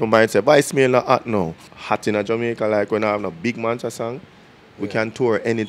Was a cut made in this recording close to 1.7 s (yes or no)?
yes